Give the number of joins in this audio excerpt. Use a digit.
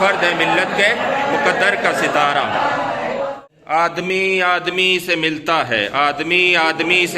1